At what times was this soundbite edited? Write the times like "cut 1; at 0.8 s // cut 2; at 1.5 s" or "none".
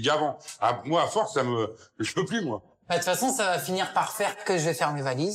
cut 1; at 2.7 s // cut 2; at 4.4 s